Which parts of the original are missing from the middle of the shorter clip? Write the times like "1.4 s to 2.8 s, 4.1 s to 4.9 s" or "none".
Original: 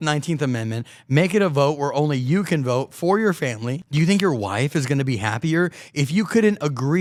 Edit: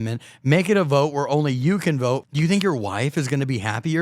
2.9 s to 3.8 s